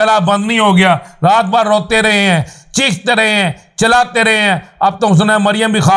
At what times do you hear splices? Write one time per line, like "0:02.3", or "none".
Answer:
none

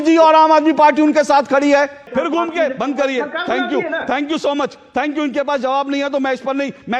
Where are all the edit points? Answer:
0:02.0

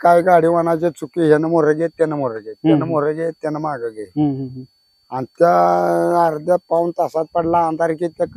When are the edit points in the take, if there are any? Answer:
none

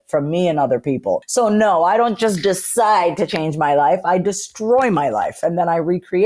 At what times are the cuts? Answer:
0:01.2

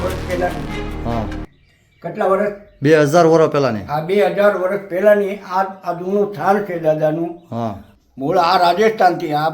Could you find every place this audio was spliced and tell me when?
0:07.8

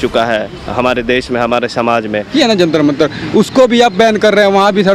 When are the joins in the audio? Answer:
0:02.3

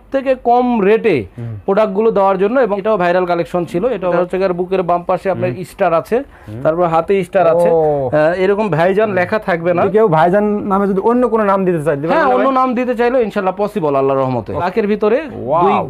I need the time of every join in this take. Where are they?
0:02.8
0:04.2
0:09.8
0:14.7

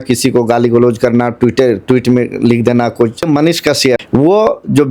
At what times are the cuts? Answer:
0:03.7

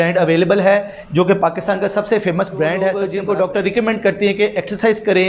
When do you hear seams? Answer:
0:03.0

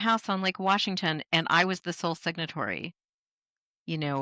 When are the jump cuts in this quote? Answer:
none

